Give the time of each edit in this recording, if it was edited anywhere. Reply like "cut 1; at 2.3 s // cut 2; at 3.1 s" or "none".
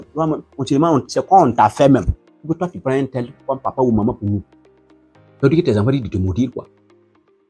none